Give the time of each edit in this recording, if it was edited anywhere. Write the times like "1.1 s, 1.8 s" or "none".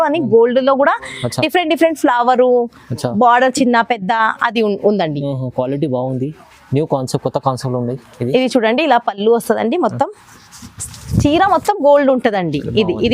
none